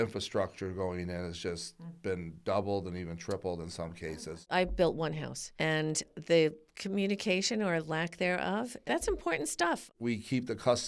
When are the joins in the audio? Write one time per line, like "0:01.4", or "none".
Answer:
0:04.3
0:09.9